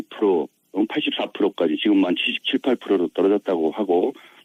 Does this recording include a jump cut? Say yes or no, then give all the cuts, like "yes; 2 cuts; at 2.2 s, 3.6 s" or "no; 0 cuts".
no; 0 cuts